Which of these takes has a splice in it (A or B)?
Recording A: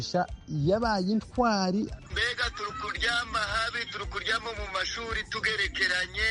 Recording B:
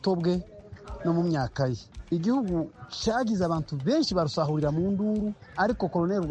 A